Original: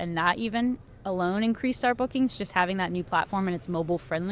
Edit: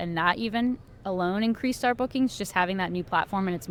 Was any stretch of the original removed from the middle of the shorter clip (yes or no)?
no